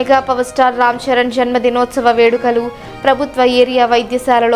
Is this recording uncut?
yes; 0 cuts

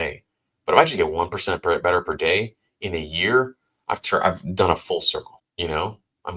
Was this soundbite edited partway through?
yes; 1 cut; at 5.4 s

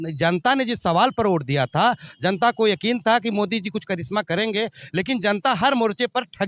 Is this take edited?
no; 0 cuts

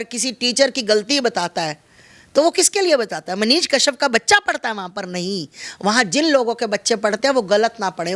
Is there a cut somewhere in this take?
no; 0 cuts

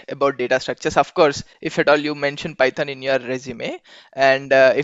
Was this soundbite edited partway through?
no; 0 cuts

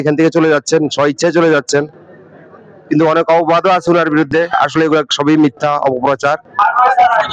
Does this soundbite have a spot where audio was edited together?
no; 0 cuts

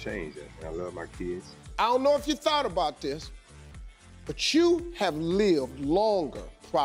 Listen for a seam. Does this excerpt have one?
no; 0 cuts

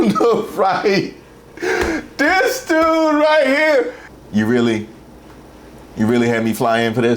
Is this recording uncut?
no; 1 cut; at 4.0 s

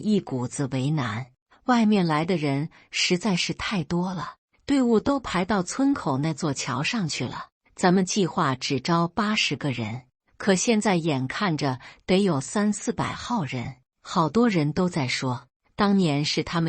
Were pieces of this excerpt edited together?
yes; 1 cut; at 1.4 s

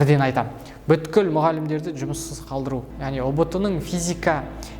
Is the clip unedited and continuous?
no; 1 cut; at 2.9 s

